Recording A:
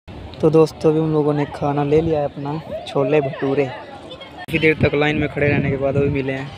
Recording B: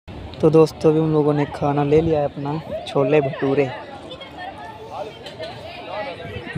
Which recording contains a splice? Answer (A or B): A